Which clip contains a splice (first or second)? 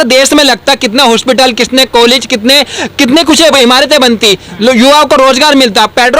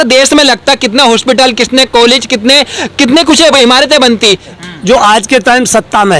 second